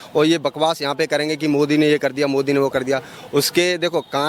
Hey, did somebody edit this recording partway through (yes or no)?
no